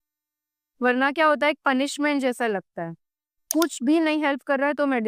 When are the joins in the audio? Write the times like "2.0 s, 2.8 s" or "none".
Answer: 3.5 s